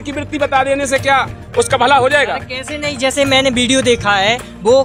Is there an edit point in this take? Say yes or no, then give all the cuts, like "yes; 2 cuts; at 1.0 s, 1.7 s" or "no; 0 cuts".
no; 0 cuts